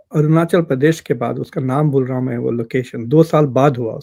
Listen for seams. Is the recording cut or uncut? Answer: uncut